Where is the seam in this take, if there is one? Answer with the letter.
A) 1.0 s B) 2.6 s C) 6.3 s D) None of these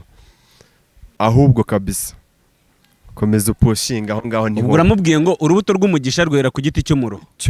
A